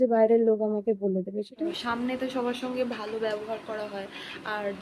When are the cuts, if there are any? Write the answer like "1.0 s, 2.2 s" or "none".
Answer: 1.6 s